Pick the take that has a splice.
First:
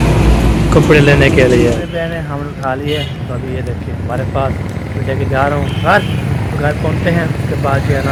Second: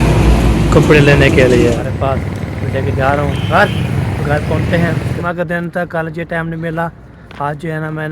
second; 2 cuts; at 1.8 s, 5.2 s

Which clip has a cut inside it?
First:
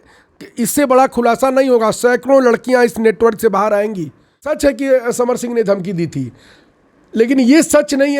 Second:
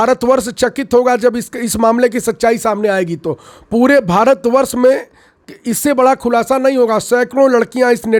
first; 1 cut; at 4.5 s

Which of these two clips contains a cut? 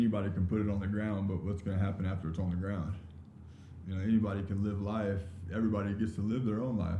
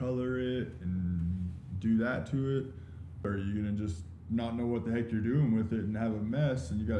second; 1 cut; at 3.2 s

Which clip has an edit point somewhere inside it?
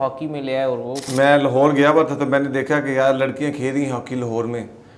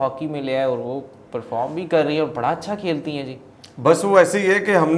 first; 1 cut; at 1.0 s

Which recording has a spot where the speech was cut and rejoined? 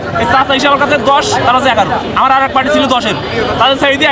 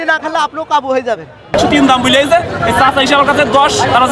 second; 1 cut; at 1.5 s

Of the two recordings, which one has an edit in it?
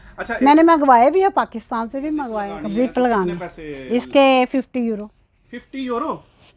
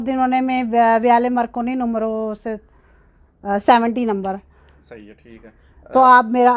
first; 1 cut; at 2.4 s

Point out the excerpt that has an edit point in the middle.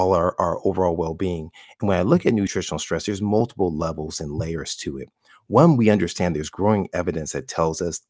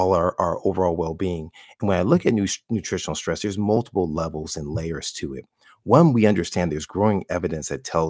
first; 1 cut; at 2.6 s

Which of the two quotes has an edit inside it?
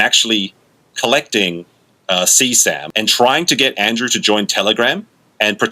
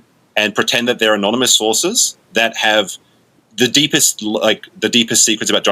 first; 1 cut; at 2.8 s

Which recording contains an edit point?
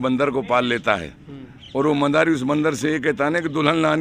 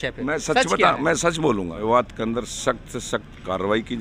second; 1 cut; at 1.8 s

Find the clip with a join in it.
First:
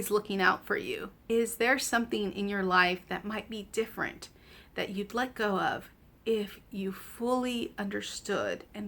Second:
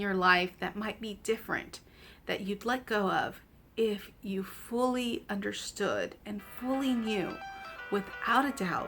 first; 1 cut; at 1.1 s

